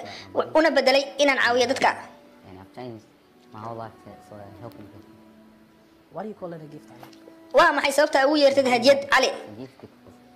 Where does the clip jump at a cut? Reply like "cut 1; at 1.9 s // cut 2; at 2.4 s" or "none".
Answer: none